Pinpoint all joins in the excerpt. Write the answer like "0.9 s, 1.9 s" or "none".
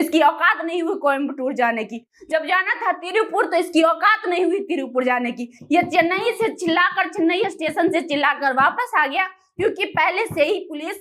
none